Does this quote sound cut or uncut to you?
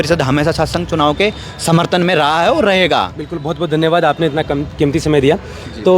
uncut